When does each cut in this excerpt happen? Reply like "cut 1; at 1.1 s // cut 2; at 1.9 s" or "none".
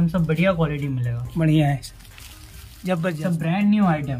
cut 1; at 3.2 s